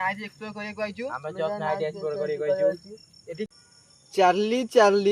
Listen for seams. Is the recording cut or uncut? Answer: cut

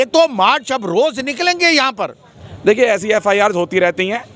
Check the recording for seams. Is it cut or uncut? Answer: cut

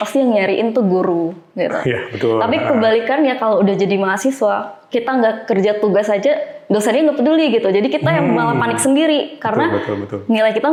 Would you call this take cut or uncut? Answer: uncut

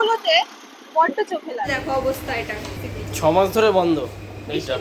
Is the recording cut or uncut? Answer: cut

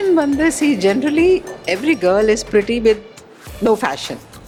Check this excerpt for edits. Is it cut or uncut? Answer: uncut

